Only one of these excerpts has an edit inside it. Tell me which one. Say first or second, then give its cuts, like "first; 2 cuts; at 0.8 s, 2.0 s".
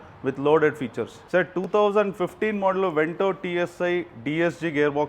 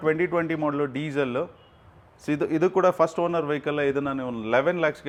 first; 1 cut; at 1.2 s